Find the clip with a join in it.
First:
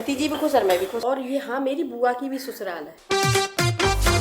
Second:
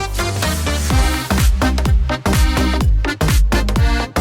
first; 2 cuts; at 1.0 s, 2.9 s

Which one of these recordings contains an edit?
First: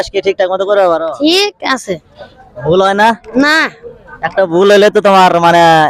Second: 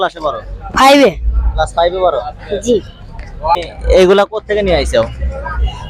second; 1 cut; at 3.6 s

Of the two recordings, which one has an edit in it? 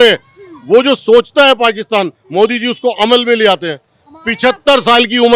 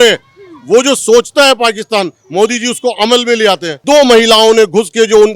second; 1 cut; at 3.7 s

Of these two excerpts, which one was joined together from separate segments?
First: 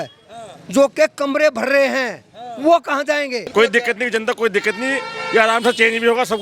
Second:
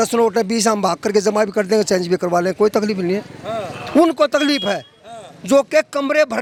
first; 1 cut; at 3.5 s

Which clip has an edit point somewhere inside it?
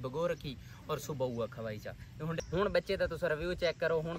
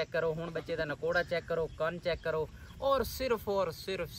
first; 1 cut; at 2.4 s

